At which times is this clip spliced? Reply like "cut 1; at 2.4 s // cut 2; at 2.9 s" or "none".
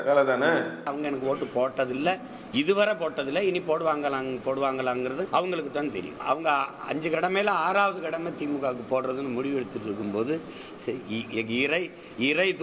cut 1; at 0.9 s // cut 2; at 5.3 s // cut 3; at 6.1 s